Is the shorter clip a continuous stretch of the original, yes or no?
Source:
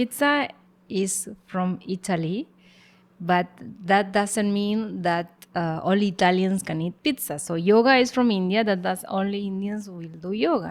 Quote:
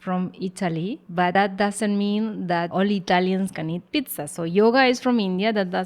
no